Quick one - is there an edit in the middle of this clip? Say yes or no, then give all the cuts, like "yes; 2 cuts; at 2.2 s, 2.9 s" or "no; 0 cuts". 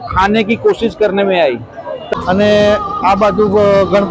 yes; 1 cut; at 2.0 s